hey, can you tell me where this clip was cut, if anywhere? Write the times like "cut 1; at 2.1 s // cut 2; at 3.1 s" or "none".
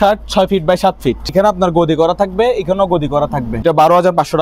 cut 1; at 1.3 s // cut 2; at 3.6 s